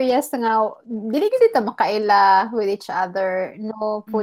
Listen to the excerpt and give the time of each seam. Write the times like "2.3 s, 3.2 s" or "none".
none

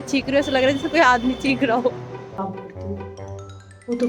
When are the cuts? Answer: 2.1 s

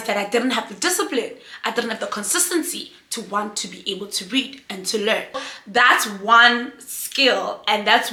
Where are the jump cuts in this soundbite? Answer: none

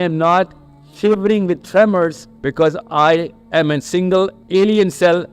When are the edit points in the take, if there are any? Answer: 2.3 s, 3.4 s, 4.4 s

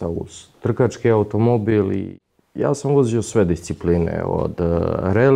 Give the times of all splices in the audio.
2.2 s

